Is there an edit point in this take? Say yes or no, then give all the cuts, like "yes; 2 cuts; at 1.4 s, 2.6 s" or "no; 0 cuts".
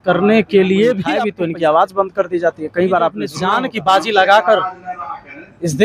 yes; 2 cuts; at 1.3 s, 3.4 s